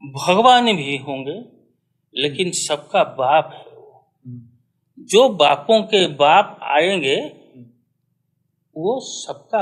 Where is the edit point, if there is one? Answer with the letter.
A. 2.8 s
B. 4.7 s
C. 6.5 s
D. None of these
D